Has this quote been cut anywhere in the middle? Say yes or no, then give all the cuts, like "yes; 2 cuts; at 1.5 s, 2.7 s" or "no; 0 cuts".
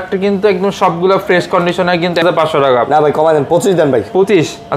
yes; 1 cut; at 2.2 s